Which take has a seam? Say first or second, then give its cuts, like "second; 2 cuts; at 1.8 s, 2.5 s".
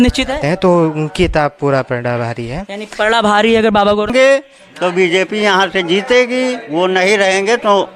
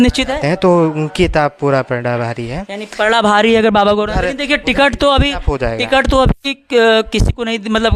first; 1 cut; at 4.1 s